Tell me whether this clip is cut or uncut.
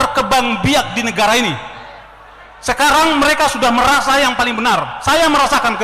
uncut